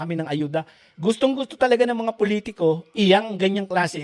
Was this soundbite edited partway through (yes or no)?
no